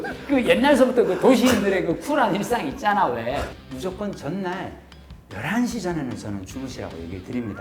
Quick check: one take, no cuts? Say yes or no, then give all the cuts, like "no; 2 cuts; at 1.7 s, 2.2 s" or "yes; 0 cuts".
no; 1 cut; at 3.6 s